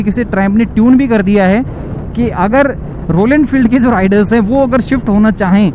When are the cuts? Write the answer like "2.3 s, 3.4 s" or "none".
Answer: none